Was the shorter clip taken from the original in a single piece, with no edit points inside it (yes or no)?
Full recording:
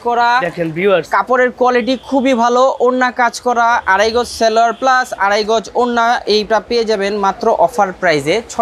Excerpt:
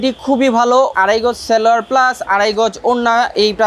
no